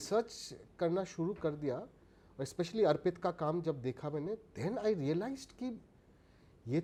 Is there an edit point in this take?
no; 0 cuts

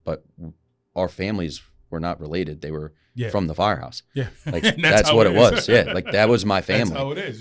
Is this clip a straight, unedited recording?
yes; 0 cuts

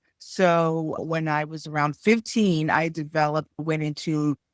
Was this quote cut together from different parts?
yes; 2 cuts; at 1.0 s, 3.6 s

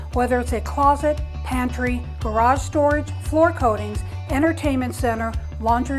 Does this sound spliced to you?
no; 0 cuts

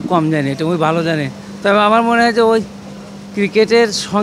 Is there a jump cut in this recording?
no; 0 cuts

